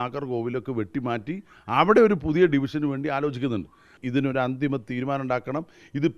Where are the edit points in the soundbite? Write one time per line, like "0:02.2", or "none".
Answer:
0:04.0